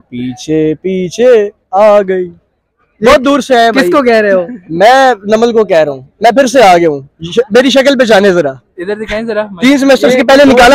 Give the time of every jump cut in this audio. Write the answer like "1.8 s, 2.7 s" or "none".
none